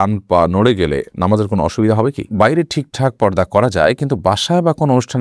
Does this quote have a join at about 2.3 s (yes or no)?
yes